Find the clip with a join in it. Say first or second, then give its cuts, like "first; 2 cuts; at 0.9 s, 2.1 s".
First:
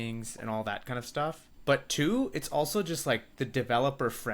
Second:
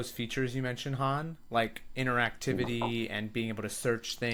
first; 2 cuts; at 1.5 s, 3.3 s